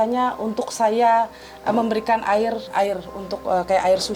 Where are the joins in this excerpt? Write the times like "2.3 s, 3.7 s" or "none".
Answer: 2.6 s